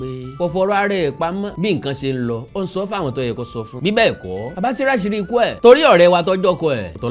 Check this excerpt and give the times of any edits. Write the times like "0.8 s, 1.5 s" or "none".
none